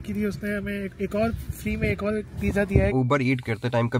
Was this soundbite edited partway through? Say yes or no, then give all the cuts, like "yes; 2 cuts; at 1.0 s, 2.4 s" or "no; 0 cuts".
yes; 1 cut; at 2.7 s